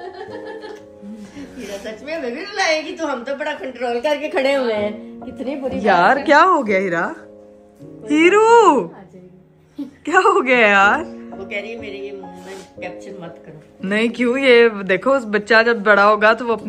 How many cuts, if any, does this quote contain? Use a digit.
0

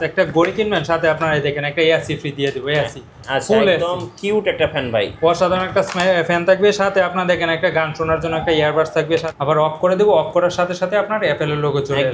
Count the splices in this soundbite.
1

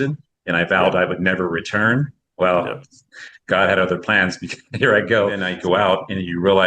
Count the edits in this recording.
1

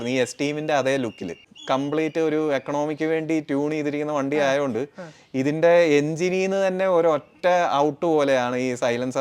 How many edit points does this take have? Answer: 1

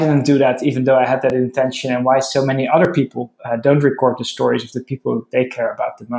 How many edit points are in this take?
0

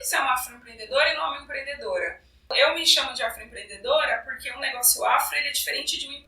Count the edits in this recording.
1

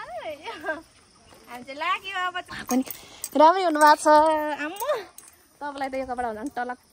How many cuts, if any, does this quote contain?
1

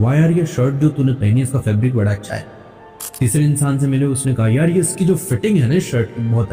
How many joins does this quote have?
0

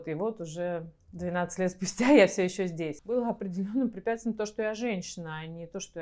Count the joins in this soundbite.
1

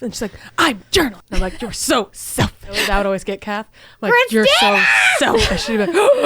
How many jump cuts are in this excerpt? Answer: 2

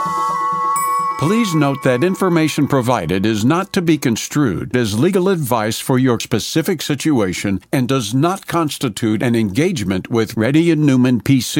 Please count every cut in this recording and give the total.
1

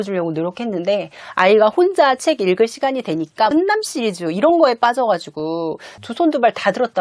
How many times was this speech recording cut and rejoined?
0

